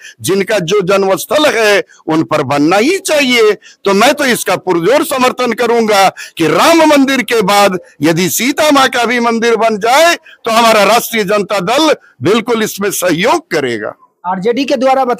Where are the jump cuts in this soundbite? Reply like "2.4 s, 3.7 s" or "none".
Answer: none